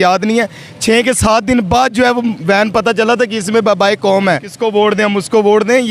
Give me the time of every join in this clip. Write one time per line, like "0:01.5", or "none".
0:04.5